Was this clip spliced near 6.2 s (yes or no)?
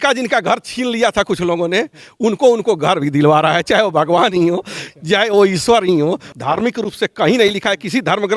yes